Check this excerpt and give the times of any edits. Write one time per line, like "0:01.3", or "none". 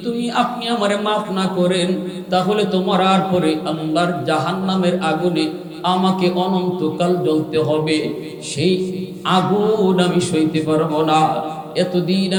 none

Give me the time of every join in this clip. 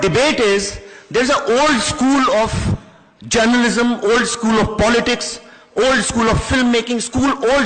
0:06.7

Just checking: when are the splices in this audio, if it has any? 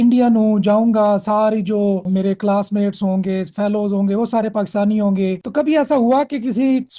0:02.1
0:05.4

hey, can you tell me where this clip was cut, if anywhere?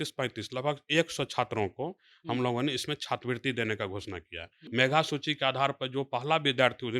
0:04.5

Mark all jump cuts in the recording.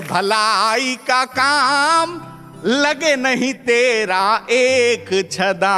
none

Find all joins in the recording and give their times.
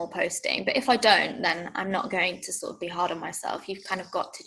none

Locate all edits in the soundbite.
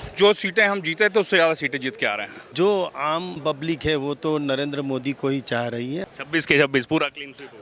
0:02.4
0:06.0

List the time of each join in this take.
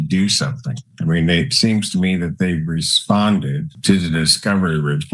0:03.7

